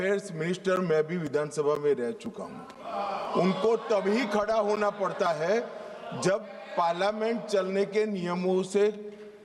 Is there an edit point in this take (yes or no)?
no